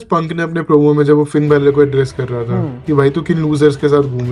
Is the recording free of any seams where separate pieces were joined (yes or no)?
yes